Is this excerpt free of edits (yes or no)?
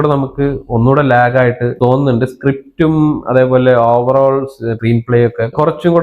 yes